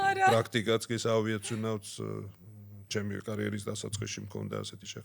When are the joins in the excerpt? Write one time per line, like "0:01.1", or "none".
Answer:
none